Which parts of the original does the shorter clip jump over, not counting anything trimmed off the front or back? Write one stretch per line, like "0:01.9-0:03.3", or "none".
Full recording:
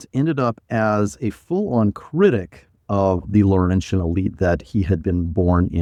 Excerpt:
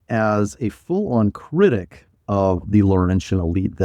none